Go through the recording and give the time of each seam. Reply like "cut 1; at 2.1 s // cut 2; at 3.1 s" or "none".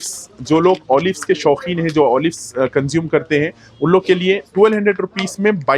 none